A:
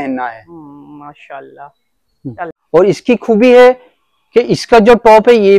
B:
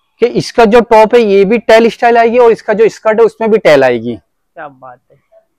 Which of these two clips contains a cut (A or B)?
A